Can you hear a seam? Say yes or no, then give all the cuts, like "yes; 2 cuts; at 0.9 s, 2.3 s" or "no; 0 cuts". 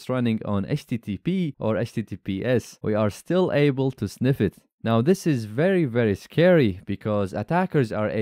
yes; 2 cuts; at 1.5 s, 2.7 s